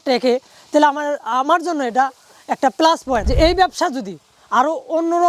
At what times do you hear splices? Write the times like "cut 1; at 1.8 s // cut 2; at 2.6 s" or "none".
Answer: cut 1; at 3.3 s